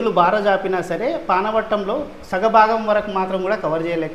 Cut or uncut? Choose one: uncut